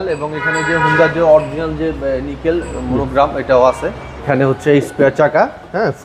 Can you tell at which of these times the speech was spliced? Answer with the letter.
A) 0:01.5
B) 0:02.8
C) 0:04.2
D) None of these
C